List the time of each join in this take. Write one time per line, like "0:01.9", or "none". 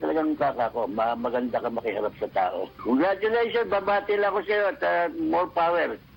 none